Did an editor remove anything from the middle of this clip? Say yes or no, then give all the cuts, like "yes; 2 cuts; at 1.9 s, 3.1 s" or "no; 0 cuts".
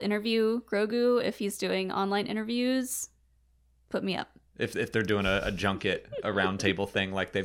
yes; 1 cut; at 4.4 s